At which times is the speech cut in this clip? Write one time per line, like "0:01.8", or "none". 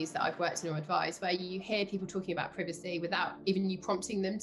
none